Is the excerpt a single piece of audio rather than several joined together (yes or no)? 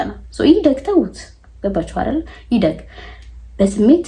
yes